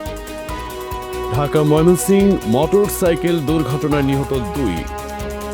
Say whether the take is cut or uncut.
cut